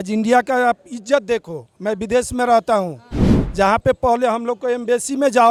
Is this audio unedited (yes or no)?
yes